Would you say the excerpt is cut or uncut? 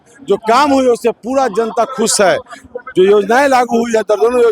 uncut